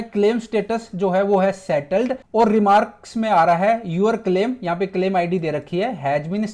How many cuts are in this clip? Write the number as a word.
one